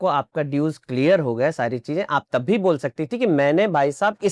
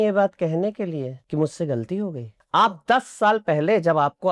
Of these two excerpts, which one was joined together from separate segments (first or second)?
second